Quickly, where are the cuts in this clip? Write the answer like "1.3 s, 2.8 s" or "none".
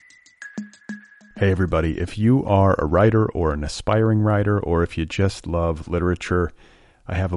0.9 s